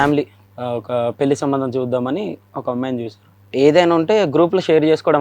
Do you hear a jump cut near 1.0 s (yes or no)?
no